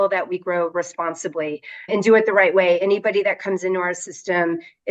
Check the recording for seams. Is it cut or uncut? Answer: cut